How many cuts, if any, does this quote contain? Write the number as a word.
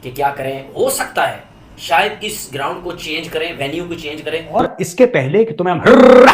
one